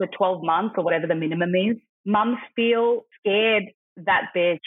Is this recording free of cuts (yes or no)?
no